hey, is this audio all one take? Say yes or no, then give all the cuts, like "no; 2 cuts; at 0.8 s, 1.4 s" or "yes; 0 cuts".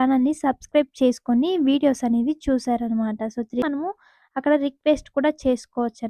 no; 1 cut; at 3.6 s